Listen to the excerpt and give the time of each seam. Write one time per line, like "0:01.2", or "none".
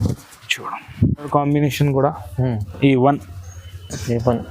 0:01.3